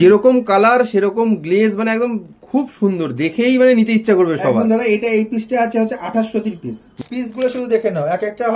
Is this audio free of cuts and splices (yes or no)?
no